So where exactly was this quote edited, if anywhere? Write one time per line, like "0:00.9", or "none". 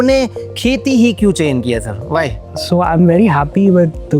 0:02.5

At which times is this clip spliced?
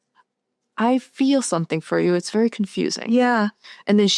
none

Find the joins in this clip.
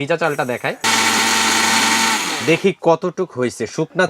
0:00.8
0:02.3

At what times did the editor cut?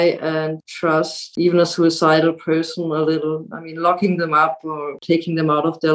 0:01.0
0:04.9

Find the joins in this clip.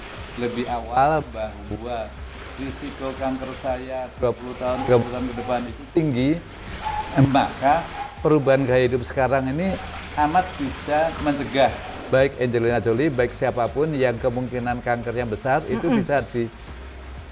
0:11.9

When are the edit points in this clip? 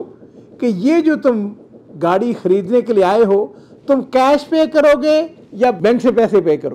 0:05.8

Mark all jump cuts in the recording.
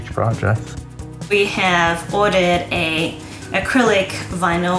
0:01.0

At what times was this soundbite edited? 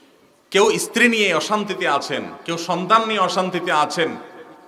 none

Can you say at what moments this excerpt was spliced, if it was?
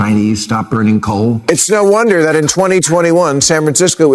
0:01.4

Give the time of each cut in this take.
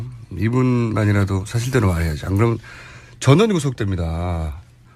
0:01.5

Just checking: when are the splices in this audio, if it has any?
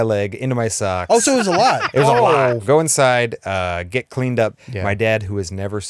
0:02.6
0:04.6

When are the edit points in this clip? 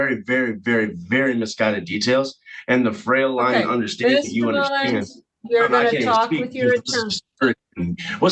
none

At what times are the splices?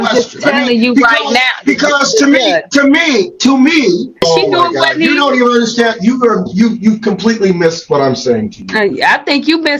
0:04.2

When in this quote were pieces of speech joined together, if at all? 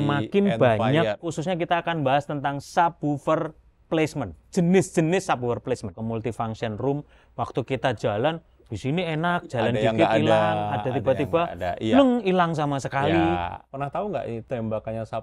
0:01.2
0:06.0
0:13.6
0:14.4

